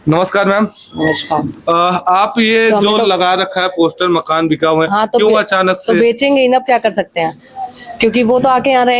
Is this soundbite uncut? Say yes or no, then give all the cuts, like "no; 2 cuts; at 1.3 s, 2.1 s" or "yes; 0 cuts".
yes; 0 cuts